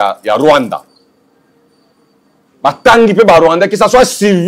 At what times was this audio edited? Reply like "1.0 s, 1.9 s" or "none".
none